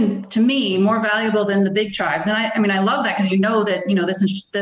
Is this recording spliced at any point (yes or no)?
no